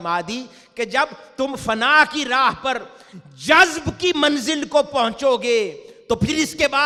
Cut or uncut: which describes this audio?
uncut